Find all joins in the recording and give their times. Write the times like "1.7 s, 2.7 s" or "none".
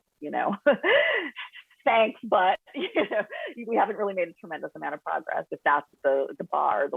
5.9 s